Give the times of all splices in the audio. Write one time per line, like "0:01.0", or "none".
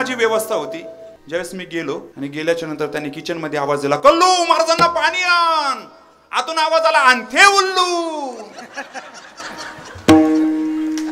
0:01.1
0:02.1